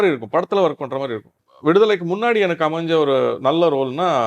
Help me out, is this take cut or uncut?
cut